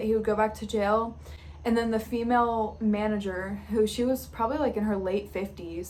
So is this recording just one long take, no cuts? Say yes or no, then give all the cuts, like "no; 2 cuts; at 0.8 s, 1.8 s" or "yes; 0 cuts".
yes; 0 cuts